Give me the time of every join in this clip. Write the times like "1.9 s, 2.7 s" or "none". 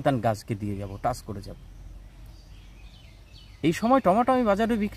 none